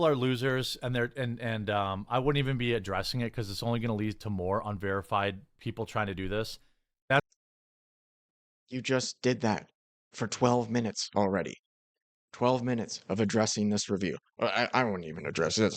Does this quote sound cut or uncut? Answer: cut